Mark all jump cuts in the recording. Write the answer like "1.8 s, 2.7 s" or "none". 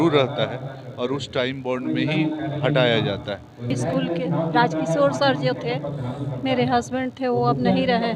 3.7 s